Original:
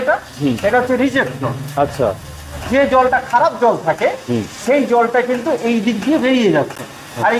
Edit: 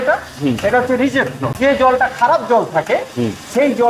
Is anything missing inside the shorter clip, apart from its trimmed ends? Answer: yes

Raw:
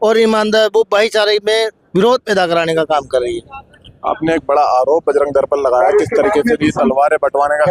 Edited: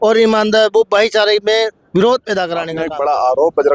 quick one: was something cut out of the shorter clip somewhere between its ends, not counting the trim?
yes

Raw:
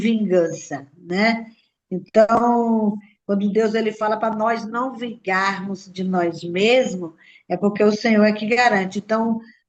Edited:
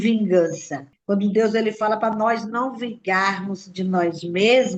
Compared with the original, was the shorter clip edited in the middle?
yes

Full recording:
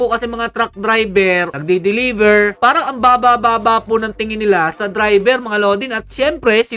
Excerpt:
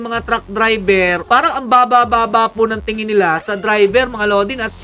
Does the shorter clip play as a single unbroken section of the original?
no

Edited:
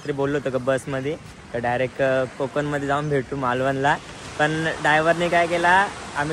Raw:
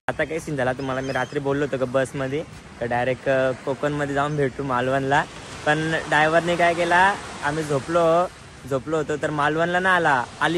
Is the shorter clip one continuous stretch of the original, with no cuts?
yes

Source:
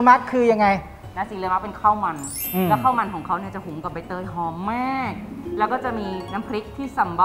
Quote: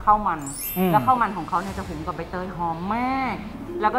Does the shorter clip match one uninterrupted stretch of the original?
yes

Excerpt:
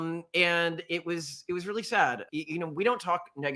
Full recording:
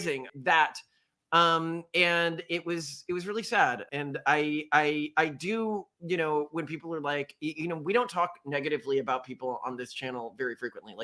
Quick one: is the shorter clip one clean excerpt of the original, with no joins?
no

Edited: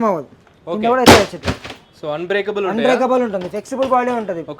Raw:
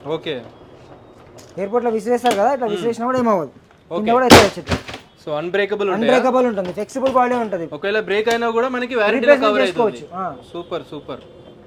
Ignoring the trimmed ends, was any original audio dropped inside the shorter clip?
no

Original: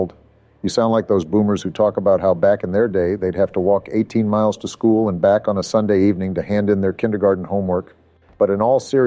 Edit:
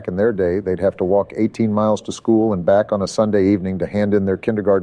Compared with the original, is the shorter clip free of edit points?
yes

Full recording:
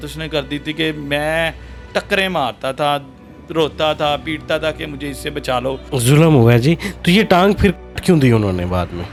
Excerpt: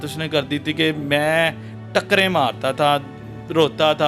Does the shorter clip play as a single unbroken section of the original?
yes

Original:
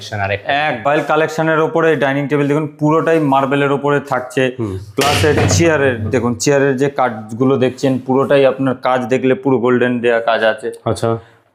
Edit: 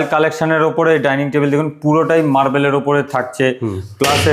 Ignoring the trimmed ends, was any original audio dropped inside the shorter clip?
no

